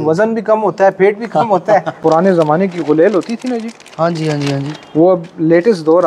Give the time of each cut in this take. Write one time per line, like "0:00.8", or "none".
0:01.9